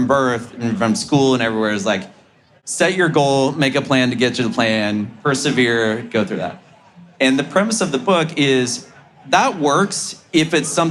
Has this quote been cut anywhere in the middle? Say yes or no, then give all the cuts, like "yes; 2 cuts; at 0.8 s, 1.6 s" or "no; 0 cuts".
no; 0 cuts